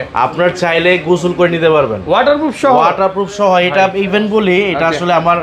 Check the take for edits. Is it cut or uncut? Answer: uncut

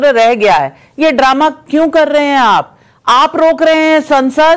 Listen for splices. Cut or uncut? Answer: uncut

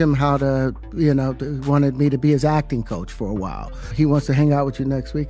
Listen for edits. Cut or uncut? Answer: cut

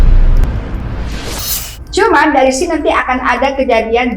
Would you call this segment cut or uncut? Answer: cut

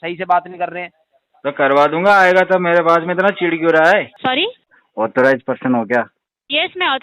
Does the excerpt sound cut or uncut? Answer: cut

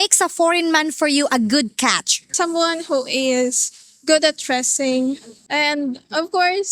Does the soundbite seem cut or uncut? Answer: cut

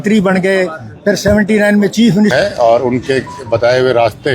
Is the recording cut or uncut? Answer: cut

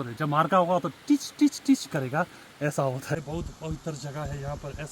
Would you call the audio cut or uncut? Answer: cut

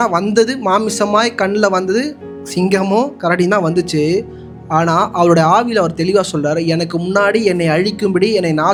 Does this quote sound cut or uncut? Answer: uncut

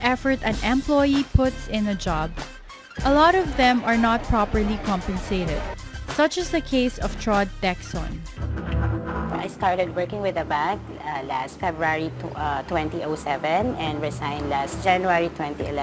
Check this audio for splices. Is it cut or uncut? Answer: cut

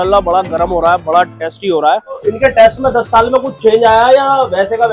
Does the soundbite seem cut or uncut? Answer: cut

